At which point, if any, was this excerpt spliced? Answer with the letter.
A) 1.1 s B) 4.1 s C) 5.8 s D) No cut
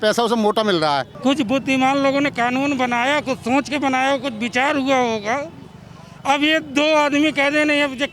A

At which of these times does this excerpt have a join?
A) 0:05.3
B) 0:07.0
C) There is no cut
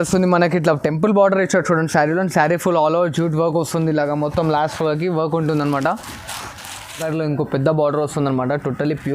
B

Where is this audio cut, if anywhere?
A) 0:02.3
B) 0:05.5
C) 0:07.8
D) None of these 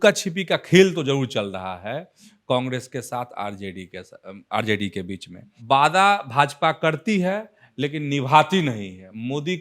B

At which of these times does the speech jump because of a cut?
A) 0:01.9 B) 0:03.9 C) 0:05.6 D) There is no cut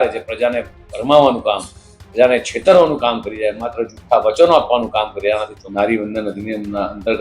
C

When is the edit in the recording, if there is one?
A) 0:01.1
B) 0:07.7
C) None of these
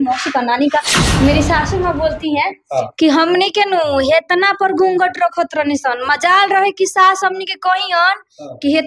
A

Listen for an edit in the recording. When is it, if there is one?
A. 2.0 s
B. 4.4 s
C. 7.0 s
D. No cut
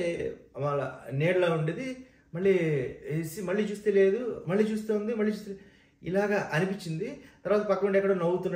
D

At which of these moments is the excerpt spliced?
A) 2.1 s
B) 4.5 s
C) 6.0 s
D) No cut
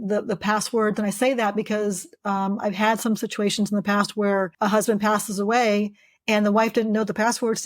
B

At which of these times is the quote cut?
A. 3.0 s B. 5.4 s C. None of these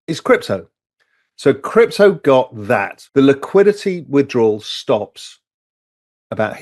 A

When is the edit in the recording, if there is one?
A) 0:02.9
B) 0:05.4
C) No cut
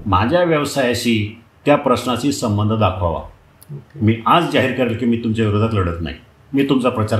C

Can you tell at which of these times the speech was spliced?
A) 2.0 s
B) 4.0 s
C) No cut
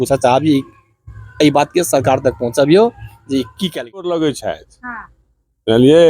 B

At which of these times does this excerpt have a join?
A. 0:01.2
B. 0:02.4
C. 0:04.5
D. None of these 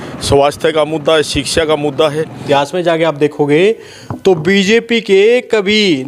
B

